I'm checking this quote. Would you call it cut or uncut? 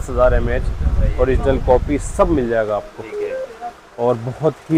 uncut